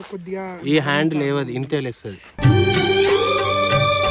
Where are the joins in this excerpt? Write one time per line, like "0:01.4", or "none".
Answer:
none